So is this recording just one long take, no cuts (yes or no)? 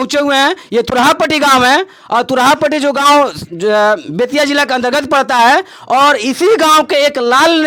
yes